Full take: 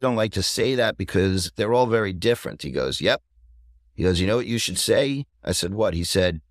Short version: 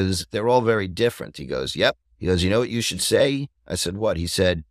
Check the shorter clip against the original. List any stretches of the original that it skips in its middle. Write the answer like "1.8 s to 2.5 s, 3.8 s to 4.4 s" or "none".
3.3 s to 3.9 s